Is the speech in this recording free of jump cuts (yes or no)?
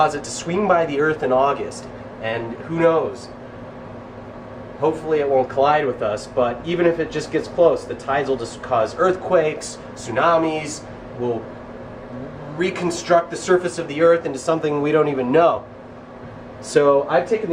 no